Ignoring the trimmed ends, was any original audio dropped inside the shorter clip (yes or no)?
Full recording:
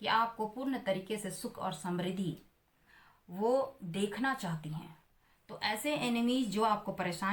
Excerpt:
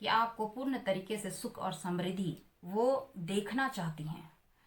yes